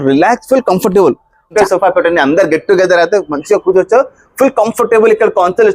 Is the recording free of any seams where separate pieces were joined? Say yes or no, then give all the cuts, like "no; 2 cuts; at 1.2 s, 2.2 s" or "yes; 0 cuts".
no; 1 cut; at 1.5 s